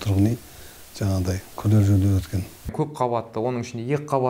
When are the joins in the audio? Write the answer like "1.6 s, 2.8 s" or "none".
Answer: 2.7 s